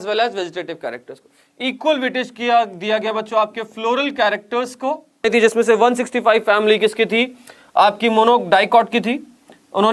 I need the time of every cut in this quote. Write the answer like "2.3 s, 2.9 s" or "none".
5.2 s